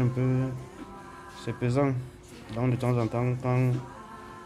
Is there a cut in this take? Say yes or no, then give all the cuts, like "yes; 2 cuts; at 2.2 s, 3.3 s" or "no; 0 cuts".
no; 0 cuts